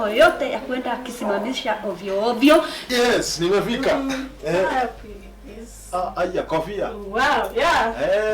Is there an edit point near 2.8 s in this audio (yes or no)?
yes